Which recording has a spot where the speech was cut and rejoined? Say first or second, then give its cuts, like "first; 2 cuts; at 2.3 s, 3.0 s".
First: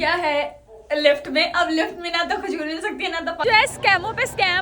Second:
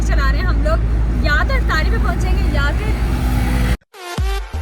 first; 1 cut; at 3.4 s